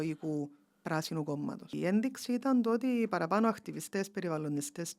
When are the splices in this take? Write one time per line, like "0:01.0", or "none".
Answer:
0:01.7